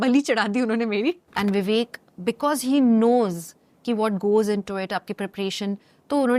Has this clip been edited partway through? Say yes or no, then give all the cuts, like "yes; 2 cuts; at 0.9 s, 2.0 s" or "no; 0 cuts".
yes; 1 cut; at 1.3 s